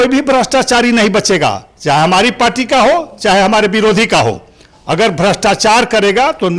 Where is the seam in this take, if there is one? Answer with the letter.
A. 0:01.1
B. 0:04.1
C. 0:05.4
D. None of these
D